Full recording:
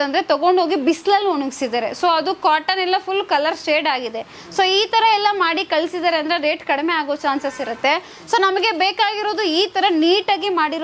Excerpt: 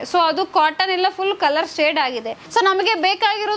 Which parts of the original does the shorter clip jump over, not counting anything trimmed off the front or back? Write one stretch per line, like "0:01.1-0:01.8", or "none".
0:04.3-0:08.1